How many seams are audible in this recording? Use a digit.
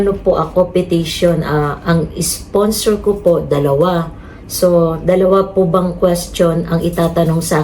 0